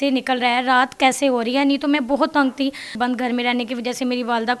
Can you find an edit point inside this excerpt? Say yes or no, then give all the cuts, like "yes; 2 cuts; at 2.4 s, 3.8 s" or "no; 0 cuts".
yes; 1 cut; at 3.0 s